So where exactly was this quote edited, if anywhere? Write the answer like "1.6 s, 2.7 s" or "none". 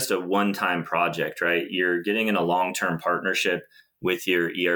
none